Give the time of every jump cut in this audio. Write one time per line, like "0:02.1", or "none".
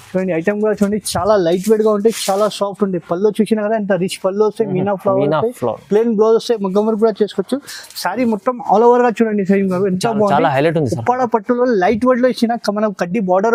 none